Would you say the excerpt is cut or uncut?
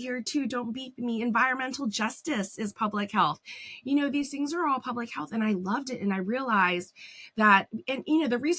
uncut